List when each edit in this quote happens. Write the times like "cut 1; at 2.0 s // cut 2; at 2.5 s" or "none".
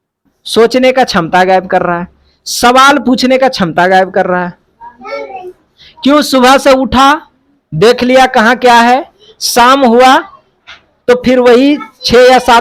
none